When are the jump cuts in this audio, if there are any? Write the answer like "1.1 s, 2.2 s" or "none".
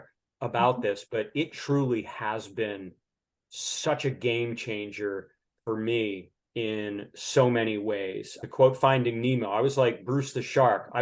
8.4 s